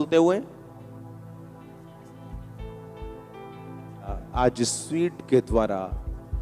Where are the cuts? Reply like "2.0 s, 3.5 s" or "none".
4.2 s